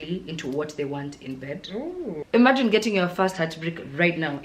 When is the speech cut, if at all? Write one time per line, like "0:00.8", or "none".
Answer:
0:02.2